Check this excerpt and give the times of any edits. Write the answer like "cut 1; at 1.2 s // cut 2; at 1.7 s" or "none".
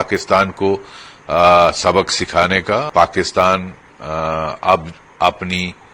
cut 1; at 2.9 s